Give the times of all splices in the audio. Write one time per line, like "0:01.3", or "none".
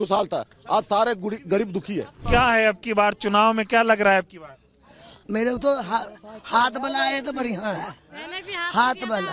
0:02.1